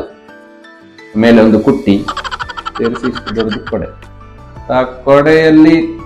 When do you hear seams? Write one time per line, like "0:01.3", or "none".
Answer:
none